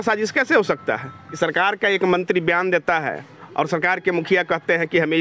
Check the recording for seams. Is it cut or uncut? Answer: cut